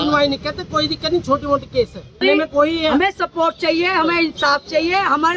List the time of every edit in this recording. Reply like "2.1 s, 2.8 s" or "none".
2.2 s